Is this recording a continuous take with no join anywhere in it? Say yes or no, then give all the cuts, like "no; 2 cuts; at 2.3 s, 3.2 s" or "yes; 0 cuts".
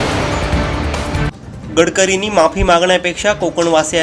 no; 1 cut; at 1.1 s